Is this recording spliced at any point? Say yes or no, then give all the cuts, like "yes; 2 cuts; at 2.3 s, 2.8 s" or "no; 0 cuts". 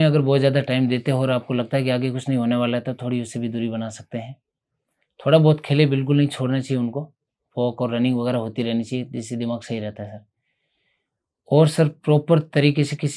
no; 0 cuts